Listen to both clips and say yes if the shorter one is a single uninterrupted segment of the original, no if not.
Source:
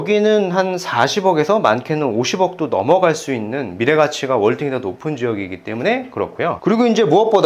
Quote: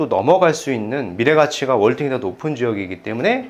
yes